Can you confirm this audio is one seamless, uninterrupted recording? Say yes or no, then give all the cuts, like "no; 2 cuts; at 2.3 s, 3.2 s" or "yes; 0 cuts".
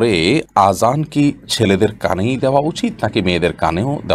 yes; 0 cuts